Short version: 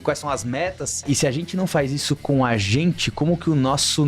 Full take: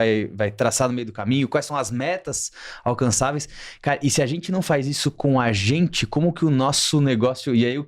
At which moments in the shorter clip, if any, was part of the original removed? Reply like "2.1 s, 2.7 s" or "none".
1.0 s